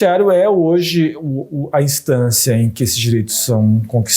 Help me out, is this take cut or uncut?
uncut